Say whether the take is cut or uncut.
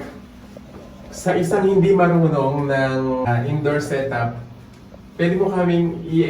cut